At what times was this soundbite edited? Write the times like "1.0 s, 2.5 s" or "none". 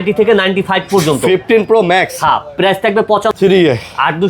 3.3 s